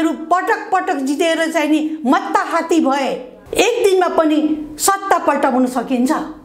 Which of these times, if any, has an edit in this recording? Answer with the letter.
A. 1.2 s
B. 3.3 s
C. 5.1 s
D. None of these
B